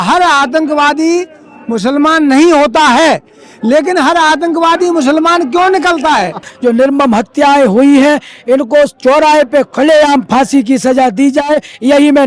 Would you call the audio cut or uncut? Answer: cut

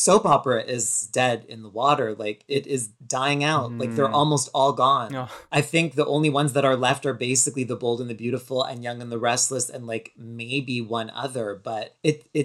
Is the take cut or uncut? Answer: cut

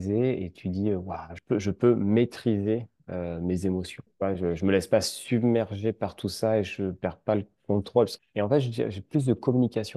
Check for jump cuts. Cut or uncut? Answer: cut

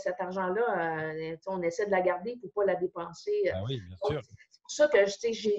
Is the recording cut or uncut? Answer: uncut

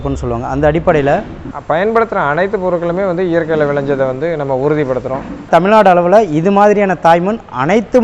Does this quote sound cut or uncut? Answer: cut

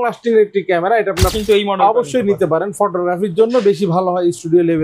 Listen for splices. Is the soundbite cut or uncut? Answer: cut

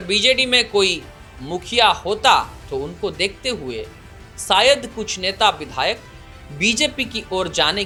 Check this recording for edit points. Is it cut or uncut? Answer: uncut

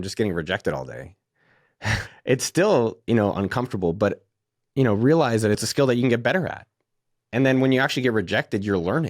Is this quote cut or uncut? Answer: cut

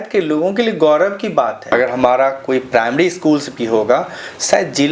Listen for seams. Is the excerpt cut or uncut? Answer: cut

